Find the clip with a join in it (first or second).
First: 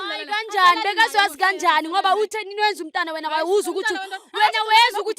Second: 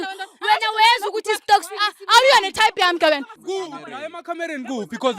second